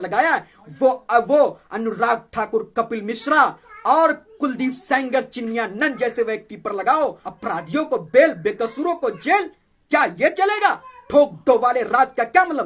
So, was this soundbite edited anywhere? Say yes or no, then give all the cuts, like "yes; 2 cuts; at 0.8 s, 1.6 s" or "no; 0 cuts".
yes; 1 cut; at 7.2 s